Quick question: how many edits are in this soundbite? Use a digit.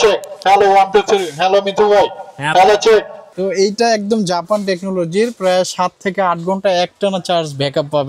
1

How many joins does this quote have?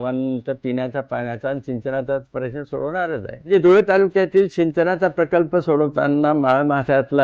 1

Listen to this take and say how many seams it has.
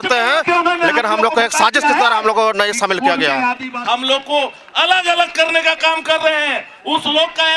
1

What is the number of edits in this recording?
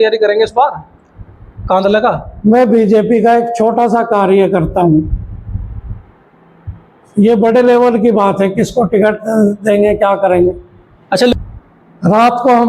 1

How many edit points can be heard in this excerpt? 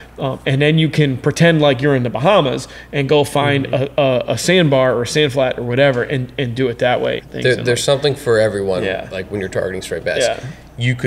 1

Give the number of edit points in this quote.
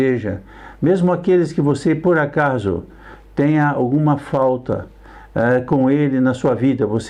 0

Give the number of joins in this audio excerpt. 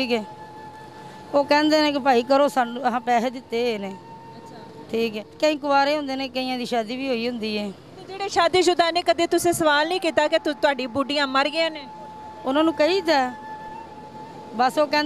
1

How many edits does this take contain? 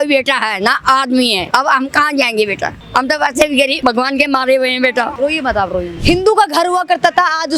5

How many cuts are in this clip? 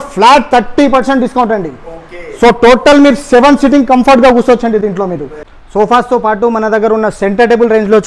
0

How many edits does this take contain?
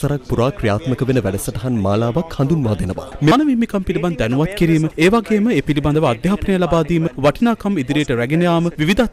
1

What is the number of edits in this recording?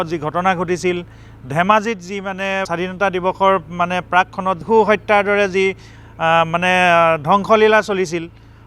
2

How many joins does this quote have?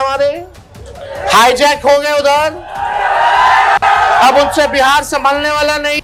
0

